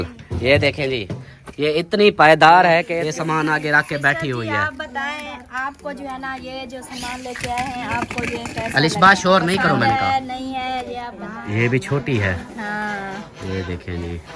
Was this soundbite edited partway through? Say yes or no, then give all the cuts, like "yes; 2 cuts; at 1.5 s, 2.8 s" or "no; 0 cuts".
yes; 2 cuts; at 2.9 s, 11.2 s